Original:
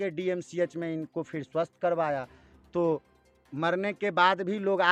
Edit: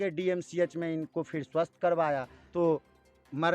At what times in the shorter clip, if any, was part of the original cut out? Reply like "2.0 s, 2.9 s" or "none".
2.4 s